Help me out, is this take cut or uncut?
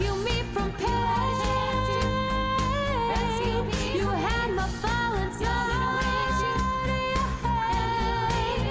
uncut